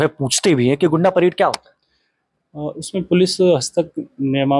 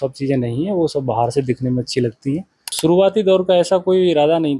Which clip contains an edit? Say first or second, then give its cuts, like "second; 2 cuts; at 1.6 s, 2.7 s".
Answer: second; 1 cut; at 2.7 s